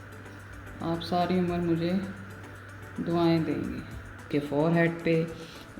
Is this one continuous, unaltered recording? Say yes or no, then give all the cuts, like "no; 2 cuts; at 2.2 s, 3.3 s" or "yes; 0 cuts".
no; 1 cut; at 4.3 s